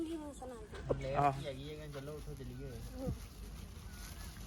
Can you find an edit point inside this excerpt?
no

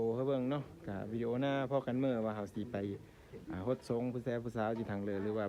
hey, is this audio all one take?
yes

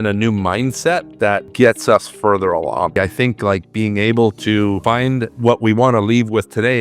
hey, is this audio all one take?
yes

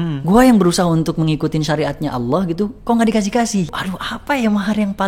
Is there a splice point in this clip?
yes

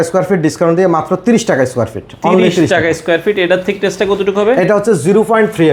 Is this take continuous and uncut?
yes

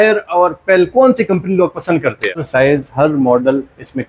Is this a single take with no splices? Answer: no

